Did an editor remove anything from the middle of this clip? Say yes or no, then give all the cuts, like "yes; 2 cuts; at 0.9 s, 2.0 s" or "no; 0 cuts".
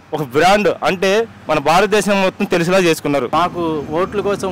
yes; 1 cut; at 3.3 s